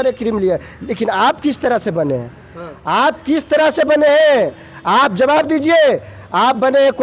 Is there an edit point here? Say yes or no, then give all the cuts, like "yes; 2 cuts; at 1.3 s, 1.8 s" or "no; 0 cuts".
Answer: no; 0 cuts